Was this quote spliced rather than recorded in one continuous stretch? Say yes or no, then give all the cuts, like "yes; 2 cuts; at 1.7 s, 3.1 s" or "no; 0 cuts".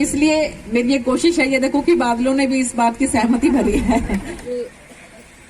yes; 1 cut; at 4.4 s